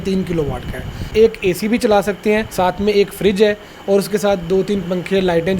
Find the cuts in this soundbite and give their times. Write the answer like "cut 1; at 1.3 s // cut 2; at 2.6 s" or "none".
cut 1; at 1.1 s // cut 2; at 2.5 s